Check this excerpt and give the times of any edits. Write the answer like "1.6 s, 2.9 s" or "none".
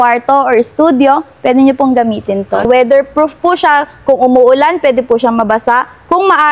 2.6 s